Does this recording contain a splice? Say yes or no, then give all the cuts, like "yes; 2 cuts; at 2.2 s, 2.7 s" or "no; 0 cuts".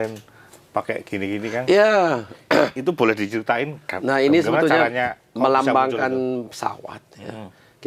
no; 0 cuts